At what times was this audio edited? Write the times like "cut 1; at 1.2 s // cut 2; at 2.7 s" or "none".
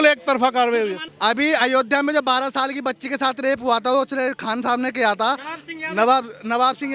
cut 1; at 1.0 s